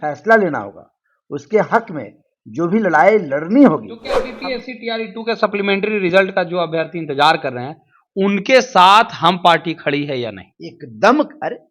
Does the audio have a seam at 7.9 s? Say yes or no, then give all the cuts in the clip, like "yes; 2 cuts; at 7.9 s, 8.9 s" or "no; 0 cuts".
no; 1 cut; at 4.2 s